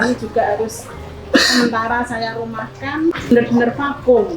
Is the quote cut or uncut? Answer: cut